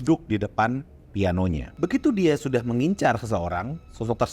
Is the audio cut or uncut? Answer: cut